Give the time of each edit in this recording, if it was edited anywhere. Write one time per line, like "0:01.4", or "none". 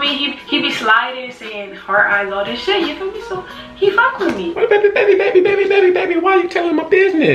0:04.4

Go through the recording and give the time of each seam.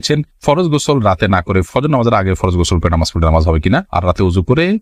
none

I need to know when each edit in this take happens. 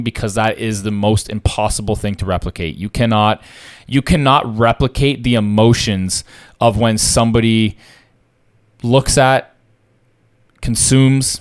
none

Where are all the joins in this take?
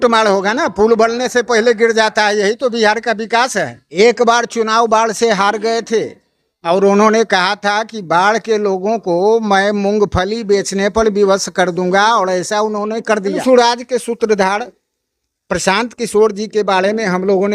0:03.8
0:13.4

